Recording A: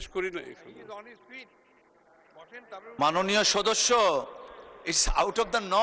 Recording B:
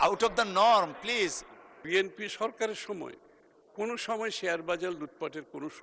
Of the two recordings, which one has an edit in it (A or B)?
B